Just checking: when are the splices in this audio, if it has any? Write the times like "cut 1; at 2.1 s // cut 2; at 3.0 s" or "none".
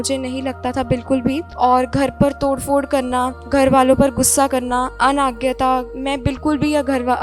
cut 1; at 1.5 s // cut 2; at 3.4 s // cut 3; at 4.9 s // cut 4; at 5.9 s